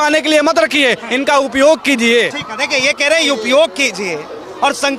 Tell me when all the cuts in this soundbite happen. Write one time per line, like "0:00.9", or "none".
none